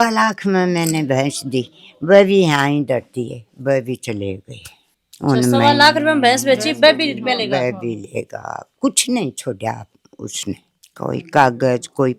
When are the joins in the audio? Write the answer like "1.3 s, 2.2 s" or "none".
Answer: none